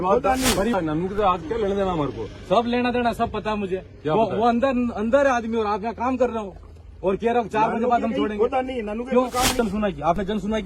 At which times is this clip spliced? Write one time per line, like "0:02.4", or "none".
0:00.7
0:09.6